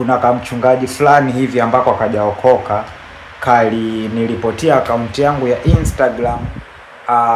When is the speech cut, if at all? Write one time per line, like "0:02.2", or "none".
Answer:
none

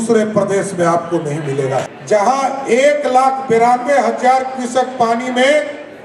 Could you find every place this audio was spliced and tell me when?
0:01.9

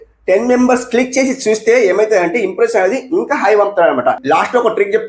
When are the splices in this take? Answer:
0:04.2

